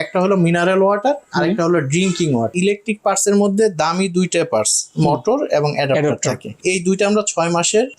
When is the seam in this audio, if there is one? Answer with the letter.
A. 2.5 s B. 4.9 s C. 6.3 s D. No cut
A